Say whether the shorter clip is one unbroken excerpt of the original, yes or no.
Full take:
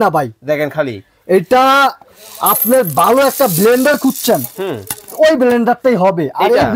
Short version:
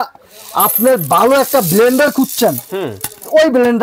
yes